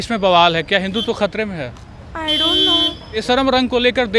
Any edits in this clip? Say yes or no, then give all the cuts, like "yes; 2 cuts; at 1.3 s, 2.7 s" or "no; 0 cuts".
no; 0 cuts